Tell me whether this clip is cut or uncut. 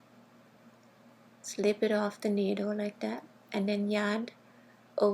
cut